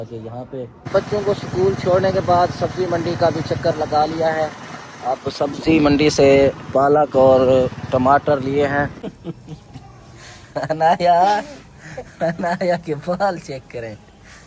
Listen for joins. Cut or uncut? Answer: cut